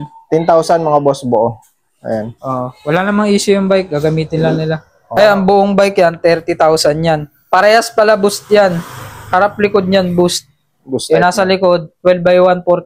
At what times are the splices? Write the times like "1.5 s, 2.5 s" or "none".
5.0 s